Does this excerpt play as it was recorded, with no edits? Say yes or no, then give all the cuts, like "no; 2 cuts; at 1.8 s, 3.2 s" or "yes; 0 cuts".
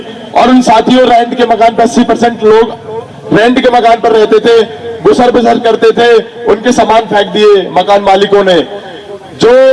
yes; 0 cuts